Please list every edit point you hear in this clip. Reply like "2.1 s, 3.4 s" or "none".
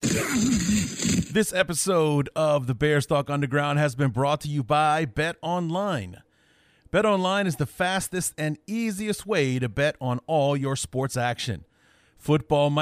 1.3 s